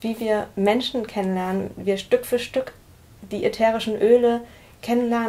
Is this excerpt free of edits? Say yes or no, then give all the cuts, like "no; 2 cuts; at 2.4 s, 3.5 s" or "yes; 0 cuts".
yes; 0 cuts